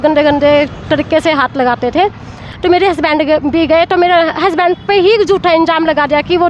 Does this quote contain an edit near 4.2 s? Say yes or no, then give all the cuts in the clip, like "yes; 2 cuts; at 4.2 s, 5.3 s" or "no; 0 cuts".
no; 1 cut; at 2.5 s